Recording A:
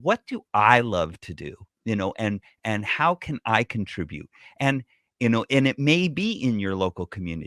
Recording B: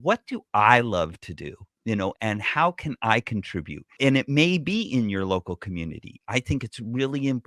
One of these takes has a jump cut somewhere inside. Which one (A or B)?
B